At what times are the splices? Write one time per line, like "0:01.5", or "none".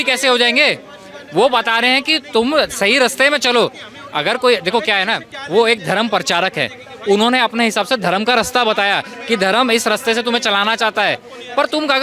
none